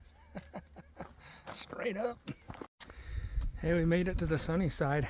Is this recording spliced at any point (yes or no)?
no